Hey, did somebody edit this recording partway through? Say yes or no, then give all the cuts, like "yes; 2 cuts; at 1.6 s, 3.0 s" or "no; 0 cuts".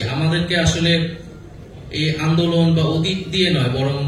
no; 0 cuts